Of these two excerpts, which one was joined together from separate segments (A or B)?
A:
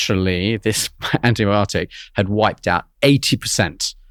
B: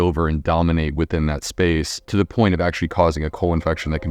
B